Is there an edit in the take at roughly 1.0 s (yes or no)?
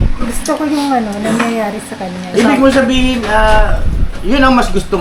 no